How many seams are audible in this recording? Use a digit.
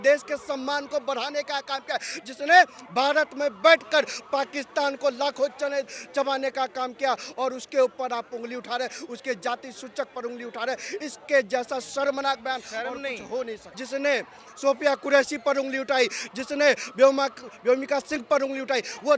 0